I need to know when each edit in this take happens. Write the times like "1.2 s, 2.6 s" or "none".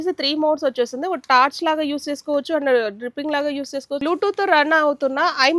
4.0 s